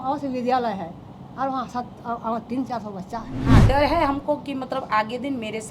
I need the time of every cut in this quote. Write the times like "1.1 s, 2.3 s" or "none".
3.4 s